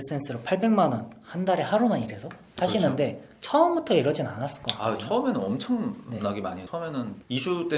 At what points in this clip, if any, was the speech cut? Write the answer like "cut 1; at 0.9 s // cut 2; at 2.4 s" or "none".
cut 1; at 6.8 s